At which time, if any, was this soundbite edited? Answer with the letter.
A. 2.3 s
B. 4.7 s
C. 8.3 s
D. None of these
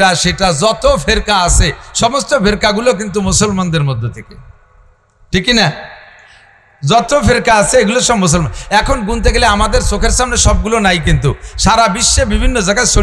D